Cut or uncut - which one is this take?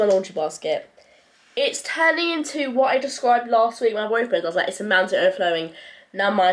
uncut